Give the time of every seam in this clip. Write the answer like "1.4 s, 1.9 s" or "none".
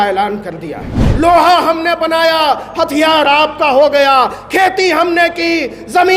1.0 s